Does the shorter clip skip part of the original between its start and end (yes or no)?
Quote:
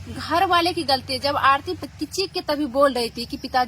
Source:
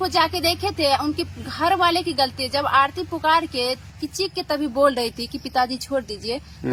yes